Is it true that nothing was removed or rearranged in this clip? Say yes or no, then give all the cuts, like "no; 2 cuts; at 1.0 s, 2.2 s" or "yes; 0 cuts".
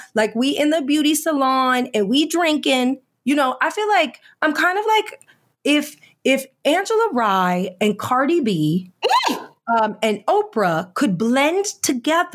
yes; 0 cuts